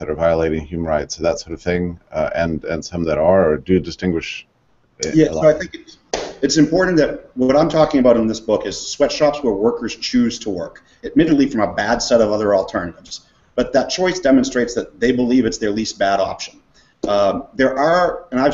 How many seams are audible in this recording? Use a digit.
1